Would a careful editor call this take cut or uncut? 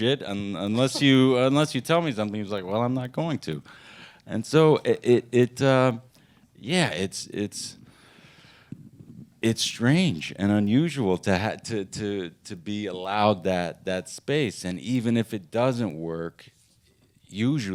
uncut